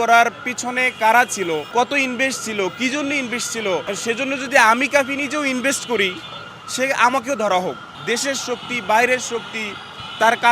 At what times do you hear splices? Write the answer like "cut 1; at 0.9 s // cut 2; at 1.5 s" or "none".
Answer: cut 1; at 1.7 s // cut 2; at 3.8 s // cut 3; at 7.9 s